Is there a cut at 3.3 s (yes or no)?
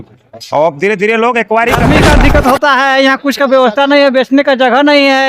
no